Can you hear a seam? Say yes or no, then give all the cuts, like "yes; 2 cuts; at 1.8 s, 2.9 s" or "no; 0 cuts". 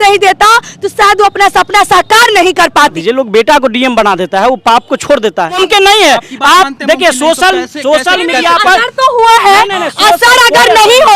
yes; 2 cuts; at 3.0 s, 5.6 s